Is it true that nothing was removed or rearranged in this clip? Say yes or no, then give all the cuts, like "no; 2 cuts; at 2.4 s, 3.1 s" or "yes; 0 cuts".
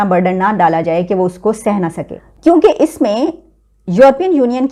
yes; 0 cuts